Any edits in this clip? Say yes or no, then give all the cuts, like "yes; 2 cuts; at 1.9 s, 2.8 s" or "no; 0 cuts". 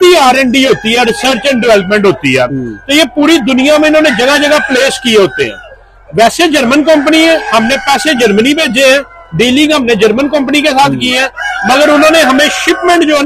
no; 0 cuts